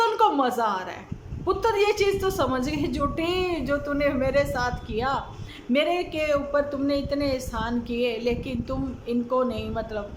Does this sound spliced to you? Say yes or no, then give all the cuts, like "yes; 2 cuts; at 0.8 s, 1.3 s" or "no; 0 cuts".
no; 0 cuts